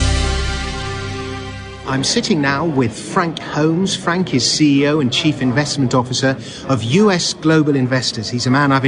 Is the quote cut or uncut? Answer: cut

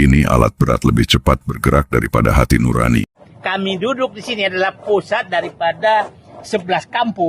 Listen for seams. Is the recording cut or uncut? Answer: cut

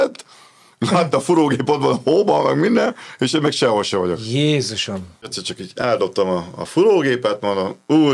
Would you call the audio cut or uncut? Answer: cut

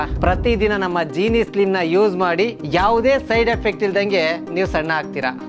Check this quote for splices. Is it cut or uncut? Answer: uncut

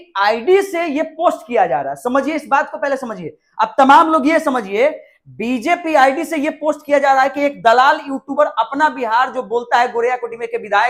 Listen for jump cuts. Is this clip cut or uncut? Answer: uncut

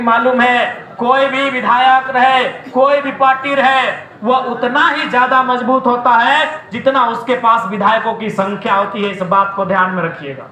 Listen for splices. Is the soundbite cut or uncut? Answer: uncut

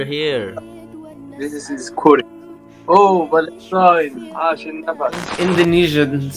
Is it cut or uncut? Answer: cut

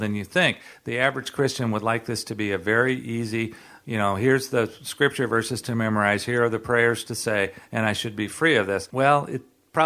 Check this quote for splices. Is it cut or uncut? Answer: cut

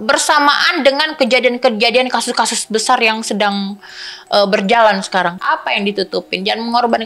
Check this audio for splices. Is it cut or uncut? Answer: cut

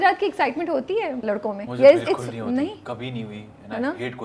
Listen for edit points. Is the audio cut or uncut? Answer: cut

